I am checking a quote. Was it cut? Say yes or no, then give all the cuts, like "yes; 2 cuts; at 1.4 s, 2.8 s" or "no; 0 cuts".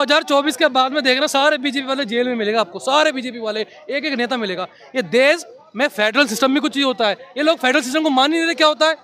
no; 0 cuts